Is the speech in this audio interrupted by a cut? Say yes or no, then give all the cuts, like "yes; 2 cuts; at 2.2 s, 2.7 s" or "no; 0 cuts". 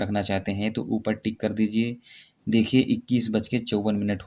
no; 0 cuts